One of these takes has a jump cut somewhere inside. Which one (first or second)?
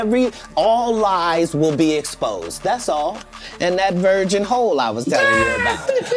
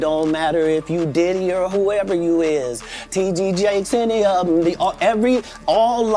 first